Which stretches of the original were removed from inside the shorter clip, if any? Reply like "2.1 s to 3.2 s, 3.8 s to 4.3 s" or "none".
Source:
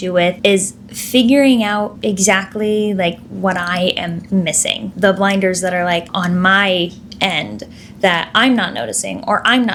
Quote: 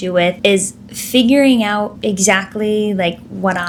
none